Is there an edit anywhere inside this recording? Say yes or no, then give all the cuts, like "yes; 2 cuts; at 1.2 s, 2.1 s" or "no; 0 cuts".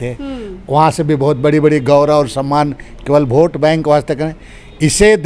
no; 0 cuts